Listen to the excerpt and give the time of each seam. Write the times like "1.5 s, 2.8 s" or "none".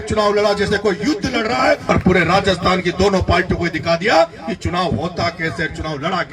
1.8 s